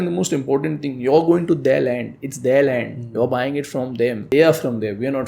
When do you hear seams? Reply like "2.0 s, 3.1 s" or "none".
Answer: 4.3 s